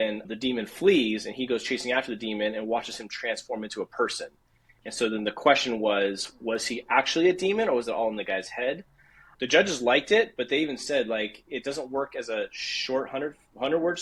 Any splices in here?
no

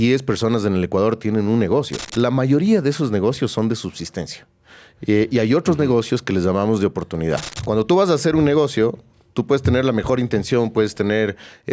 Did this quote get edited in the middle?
yes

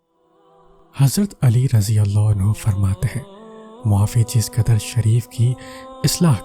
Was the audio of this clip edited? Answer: yes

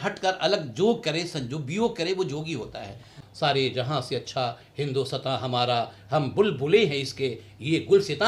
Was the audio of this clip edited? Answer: yes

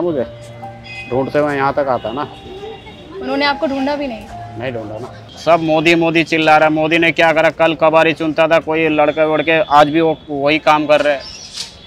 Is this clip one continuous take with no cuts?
no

